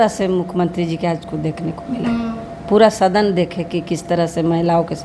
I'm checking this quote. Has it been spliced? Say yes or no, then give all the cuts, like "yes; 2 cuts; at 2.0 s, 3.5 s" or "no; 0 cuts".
no; 0 cuts